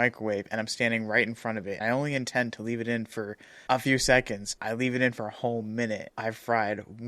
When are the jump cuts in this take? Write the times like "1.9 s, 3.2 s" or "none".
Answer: 1.8 s, 3.5 s, 4.4 s, 6.1 s